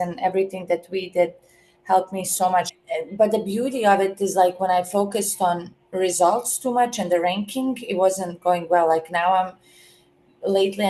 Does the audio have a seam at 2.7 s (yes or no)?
yes